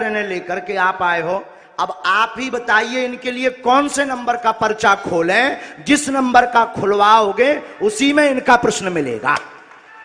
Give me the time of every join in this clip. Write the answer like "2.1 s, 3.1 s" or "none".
none